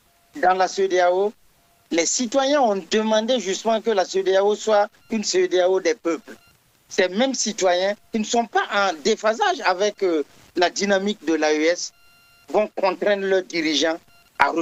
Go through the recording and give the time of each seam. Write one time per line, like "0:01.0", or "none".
none